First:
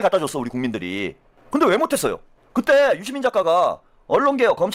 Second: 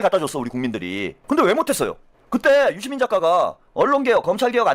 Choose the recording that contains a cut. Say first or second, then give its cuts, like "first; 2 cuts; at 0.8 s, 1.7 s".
second; 2 cuts; at 1.1 s, 3.6 s